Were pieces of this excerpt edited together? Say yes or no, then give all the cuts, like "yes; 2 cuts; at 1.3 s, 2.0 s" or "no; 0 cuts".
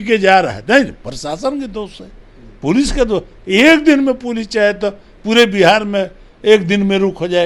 no; 0 cuts